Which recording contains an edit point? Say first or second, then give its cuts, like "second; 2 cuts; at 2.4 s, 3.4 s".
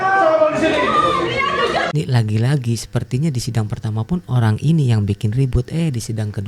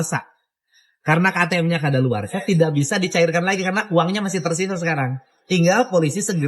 first; 1 cut; at 1.9 s